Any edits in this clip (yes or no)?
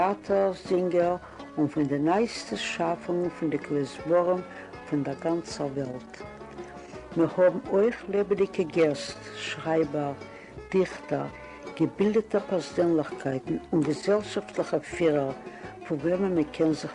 no